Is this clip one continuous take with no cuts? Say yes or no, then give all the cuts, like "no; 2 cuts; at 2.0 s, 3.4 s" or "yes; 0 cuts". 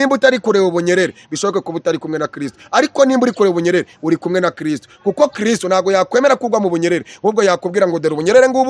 yes; 0 cuts